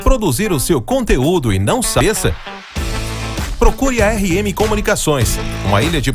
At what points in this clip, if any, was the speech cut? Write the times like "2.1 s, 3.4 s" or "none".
2.0 s